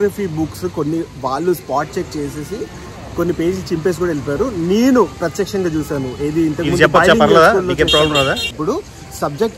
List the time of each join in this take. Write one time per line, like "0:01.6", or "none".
0:08.5